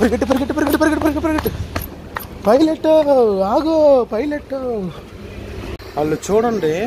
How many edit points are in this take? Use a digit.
1